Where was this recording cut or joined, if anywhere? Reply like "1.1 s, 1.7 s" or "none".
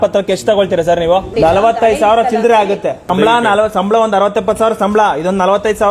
1.3 s